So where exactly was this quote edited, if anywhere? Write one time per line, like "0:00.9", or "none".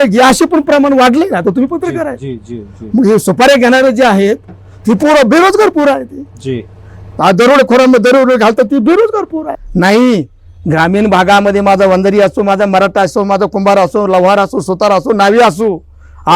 0:09.6